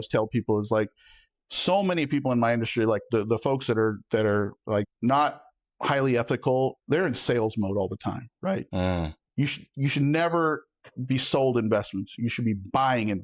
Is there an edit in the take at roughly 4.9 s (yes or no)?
yes